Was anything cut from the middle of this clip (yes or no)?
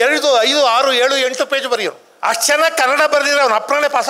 yes